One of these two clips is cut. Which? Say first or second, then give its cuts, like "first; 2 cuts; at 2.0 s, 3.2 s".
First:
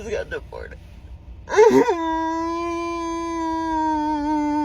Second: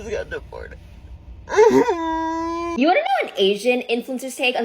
second; 1 cut; at 2.7 s